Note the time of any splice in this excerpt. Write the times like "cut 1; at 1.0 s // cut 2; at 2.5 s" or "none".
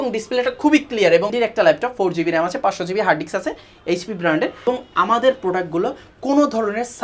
cut 1; at 1.3 s // cut 2; at 4.6 s